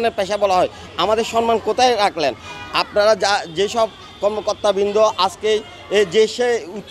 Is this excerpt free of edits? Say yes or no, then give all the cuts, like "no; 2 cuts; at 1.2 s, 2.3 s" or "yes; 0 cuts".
yes; 0 cuts